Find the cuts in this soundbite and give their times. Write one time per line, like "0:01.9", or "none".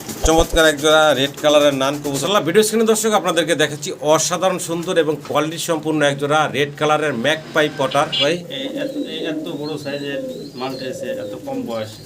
0:02.1
0:08.2